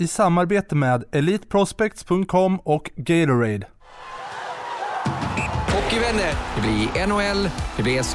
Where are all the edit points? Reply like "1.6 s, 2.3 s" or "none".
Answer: 4.2 s